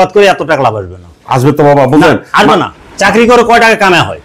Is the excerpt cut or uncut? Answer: cut